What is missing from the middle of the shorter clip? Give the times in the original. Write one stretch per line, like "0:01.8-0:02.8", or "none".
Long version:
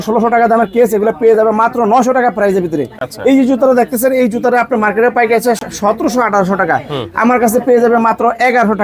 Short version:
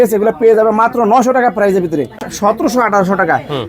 0:03.1-0:05.7